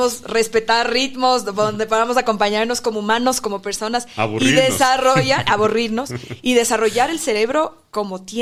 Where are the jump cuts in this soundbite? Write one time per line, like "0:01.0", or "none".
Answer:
none